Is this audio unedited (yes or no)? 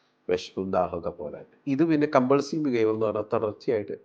no